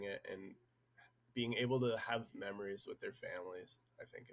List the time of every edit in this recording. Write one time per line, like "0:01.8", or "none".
none